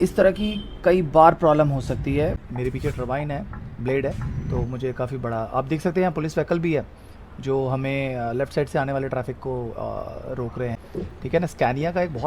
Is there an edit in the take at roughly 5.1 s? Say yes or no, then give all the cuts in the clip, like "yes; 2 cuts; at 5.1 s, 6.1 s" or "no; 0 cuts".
no; 2 cuts; at 2.5 s, 10.8 s